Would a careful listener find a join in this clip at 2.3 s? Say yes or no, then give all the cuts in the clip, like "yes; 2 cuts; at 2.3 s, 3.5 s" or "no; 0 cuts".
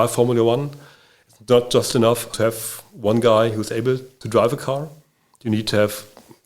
yes; 2 cuts; at 2.3 s, 4.1 s